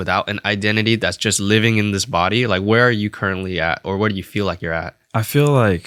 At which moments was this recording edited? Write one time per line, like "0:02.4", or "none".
none